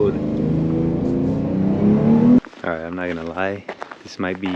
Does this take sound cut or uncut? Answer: cut